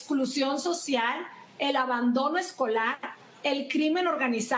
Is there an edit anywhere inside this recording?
no; 0 cuts

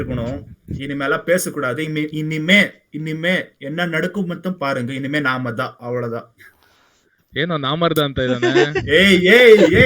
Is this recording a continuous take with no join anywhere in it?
yes; 0 cuts

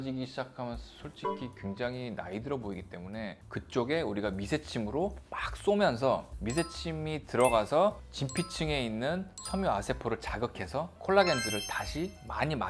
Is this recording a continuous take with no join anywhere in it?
yes; 0 cuts

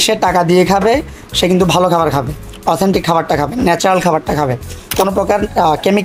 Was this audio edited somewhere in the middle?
yes; 1 cut; at 4.9 s

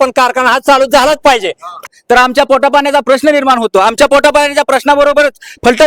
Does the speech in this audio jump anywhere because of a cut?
yes; 1 cut; at 1.8 s

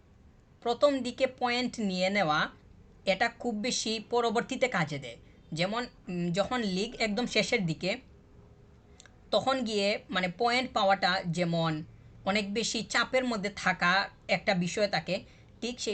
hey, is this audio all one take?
yes; 0 cuts

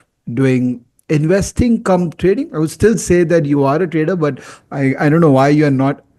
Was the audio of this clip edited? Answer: no; 0 cuts

